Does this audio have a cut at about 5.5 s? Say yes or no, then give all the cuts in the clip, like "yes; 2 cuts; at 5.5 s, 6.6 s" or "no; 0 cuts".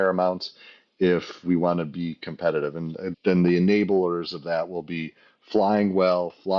no; 1 cut; at 3.1 s